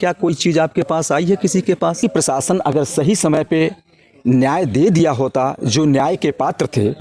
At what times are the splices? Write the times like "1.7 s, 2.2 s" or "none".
2.0 s